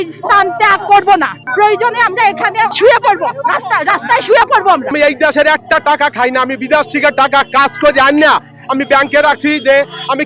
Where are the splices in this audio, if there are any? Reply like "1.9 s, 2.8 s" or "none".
1.4 s, 2.7 s, 4.9 s

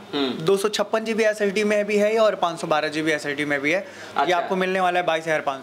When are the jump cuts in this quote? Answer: 4.0 s

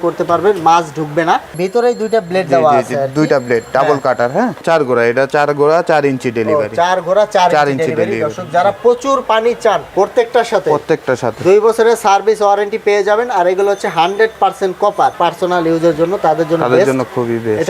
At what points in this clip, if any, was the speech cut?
1.6 s, 4.6 s, 9.9 s, 15.1 s

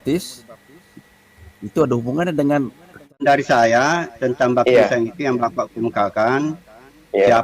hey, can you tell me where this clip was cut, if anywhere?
3.2 s

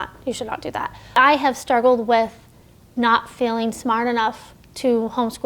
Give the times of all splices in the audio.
1.2 s

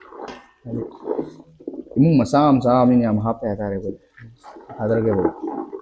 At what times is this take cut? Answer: none

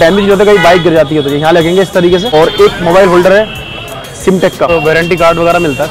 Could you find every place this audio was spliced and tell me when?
2.3 s, 4.7 s

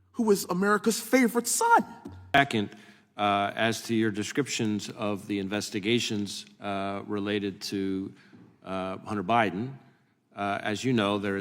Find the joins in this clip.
2.4 s

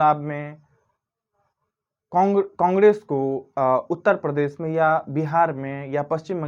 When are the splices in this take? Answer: none

